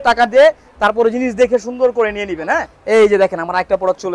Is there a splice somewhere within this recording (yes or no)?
yes